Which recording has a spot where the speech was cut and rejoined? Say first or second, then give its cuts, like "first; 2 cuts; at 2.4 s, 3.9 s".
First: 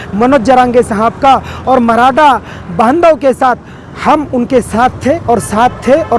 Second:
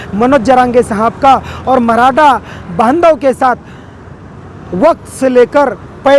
first; 1 cut; at 3.9 s